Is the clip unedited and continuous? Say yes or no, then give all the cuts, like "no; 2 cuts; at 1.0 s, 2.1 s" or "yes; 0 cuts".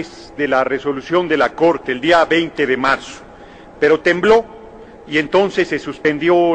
no; 1 cut; at 4.1 s